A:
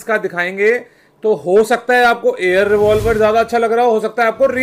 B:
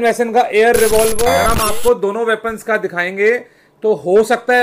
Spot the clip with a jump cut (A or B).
B